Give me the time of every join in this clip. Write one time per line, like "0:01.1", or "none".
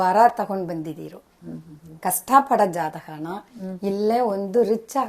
none